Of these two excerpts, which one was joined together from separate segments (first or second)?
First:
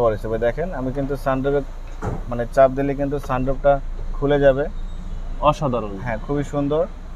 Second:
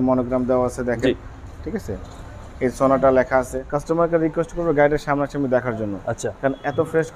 second